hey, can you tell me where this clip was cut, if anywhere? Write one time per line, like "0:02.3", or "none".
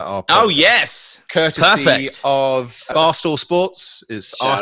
0:02.9